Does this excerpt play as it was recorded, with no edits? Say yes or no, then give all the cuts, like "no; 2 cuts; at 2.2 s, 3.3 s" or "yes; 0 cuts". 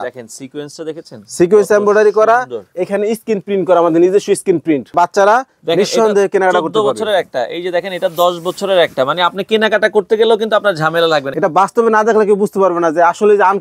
no; 2 cuts; at 4.9 s, 11.3 s